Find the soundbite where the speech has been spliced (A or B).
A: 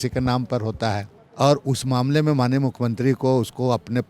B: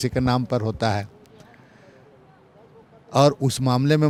A